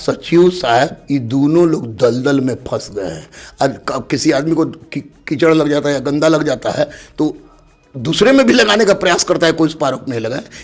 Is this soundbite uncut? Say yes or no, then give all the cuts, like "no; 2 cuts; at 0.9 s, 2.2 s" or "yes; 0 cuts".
yes; 0 cuts